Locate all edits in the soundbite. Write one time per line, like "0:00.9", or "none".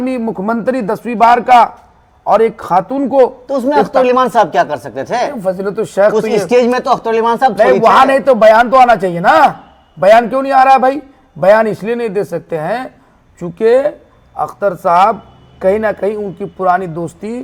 none